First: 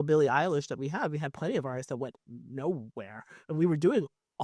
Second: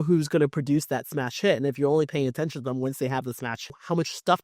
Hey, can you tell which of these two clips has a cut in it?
second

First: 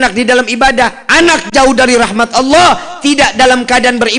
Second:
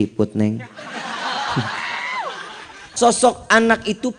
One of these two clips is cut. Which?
second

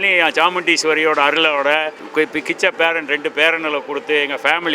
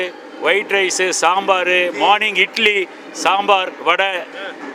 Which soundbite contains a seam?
first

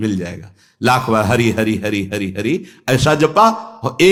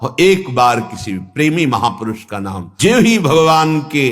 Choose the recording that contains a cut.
second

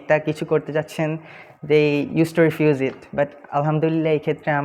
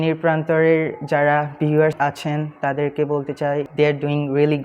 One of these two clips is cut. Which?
second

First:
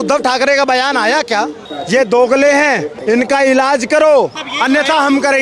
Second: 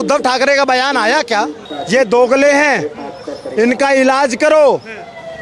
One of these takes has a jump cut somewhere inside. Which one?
first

